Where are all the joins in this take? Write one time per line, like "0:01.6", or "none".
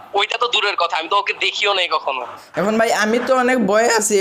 0:02.4